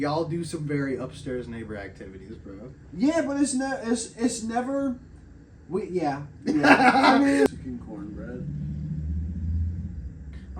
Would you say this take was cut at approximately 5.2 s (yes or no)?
no